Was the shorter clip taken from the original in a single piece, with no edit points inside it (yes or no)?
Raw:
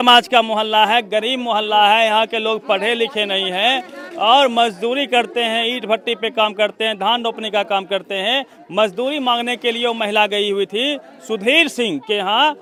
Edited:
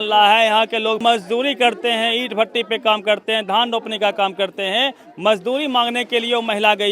no